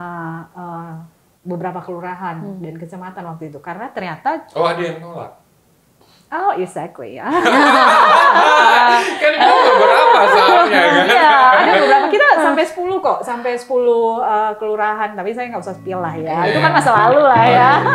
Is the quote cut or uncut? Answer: uncut